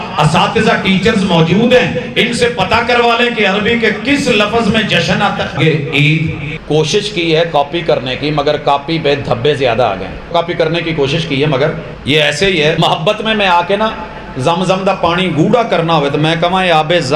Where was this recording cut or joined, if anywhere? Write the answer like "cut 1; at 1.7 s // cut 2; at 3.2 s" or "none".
cut 1; at 5.6 s // cut 2; at 6.5 s // cut 3; at 10.3 s // cut 4; at 11.9 s // cut 5; at 12.8 s